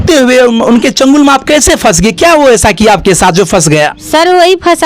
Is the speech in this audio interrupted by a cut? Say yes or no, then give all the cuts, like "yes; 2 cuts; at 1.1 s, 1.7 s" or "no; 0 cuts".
no; 0 cuts